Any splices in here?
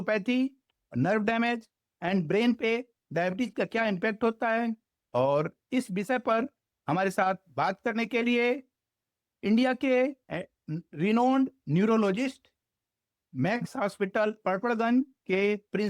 no; 0 cuts

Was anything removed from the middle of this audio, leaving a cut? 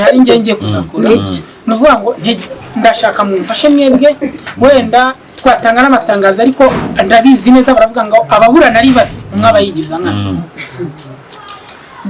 no; 0 cuts

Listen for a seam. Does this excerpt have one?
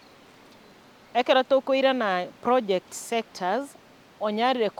no; 0 cuts

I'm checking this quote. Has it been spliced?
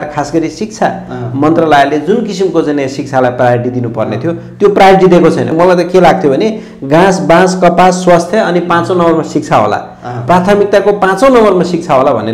yes; 1 cut; at 5.5 s

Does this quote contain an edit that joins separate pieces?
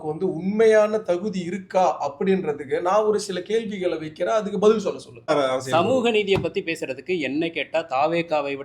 yes; 1 cut; at 5.3 s

